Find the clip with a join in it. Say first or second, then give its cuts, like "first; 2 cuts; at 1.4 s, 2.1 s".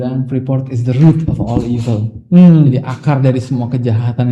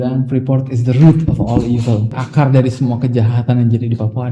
second; 1 cut; at 2.2 s